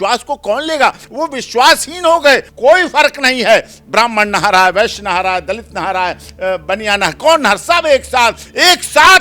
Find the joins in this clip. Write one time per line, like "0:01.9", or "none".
0:02.5